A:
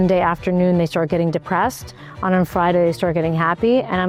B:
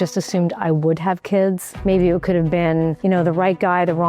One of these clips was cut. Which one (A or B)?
B